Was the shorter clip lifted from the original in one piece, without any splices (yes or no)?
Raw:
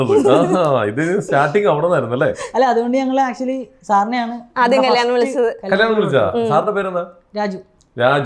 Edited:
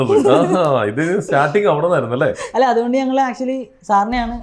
yes